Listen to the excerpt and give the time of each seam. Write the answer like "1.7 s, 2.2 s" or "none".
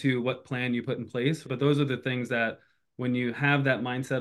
1.4 s